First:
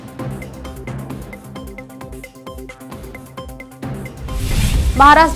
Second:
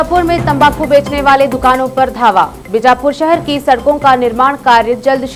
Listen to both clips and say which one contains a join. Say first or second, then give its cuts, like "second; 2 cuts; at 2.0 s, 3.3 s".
first; 1 cut; at 1.5 s